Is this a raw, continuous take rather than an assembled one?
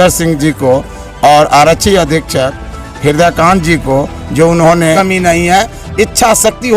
no; 1 cut; at 5.0 s

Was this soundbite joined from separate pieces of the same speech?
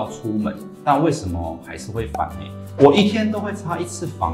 yes; 1 cut; at 2.6 s

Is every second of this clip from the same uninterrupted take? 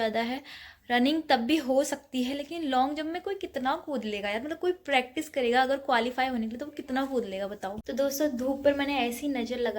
no; 1 cut; at 7.8 s

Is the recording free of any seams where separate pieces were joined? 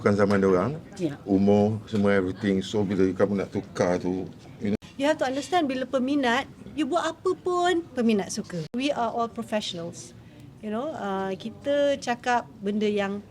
no; 2 cuts; at 4.8 s, 8.6 s

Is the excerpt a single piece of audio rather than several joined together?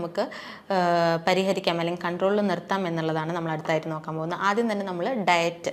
yes; 0 cuts

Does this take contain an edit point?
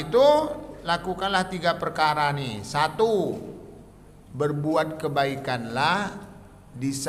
no; 0 cuts

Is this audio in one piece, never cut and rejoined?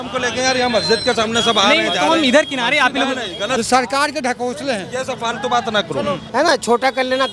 no; 2 cuts; at 3.6 s, 6.2 s

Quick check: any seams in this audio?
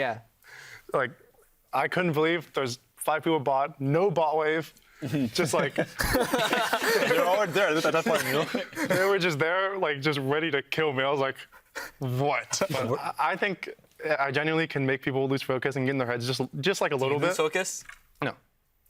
yes; 1 cut; at 12.7 s

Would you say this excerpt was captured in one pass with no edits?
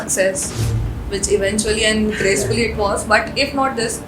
yes; 0 cuts

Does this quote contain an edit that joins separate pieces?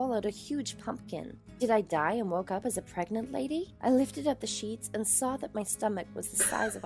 no; 0 cuts

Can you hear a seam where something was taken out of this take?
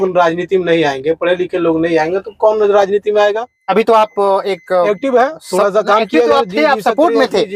yes; 1 cut; at 3.5 s

